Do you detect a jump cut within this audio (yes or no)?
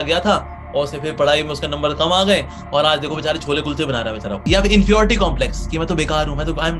yes